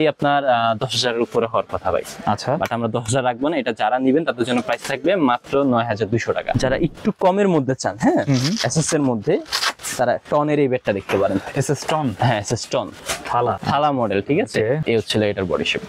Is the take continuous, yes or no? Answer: no